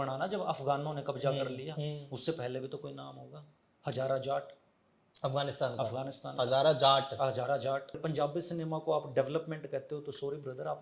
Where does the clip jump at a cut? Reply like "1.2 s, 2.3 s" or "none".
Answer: 8.0 s